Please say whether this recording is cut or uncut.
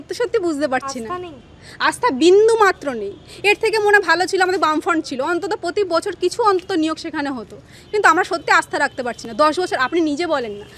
uncut